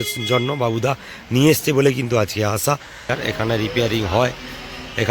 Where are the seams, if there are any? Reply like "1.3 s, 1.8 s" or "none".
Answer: 3.1 s